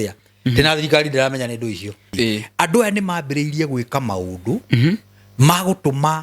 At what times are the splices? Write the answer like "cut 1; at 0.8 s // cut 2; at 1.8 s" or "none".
cut 1; at 2.1 s